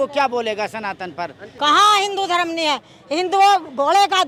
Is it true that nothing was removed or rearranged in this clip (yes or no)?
yes